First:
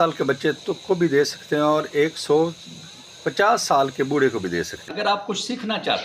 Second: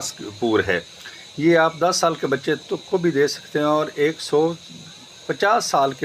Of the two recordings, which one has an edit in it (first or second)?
first